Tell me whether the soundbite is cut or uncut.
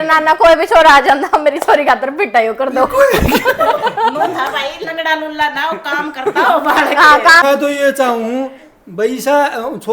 cut